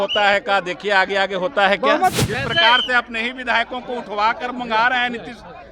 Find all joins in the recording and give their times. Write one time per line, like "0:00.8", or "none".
0:02.1